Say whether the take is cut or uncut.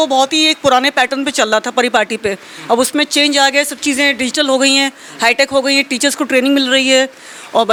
uncut